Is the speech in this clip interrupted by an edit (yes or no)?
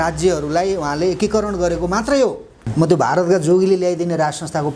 yes